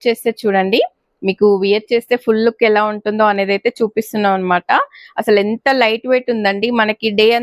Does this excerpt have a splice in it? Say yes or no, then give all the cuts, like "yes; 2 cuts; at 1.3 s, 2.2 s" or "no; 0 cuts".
no; 0 cuts